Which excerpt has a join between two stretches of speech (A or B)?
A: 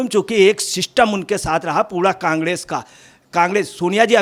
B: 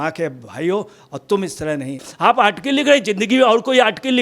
B